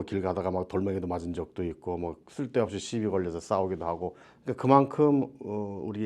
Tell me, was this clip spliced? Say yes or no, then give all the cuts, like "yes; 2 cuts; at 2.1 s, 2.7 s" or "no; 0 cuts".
yes; 1 cut; at 4.3 s